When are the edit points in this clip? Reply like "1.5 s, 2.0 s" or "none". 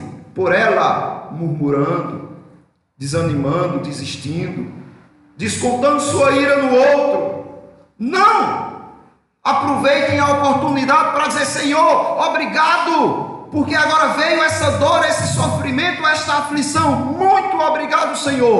none